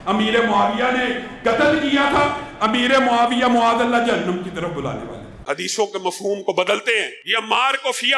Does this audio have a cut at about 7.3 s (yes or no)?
no